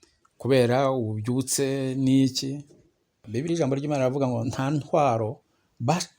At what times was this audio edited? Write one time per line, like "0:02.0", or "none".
0:03.2
0:04.5